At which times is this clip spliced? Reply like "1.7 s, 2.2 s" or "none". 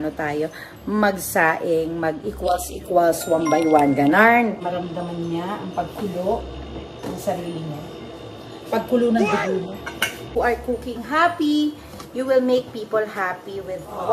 4.7 s, 10.3 s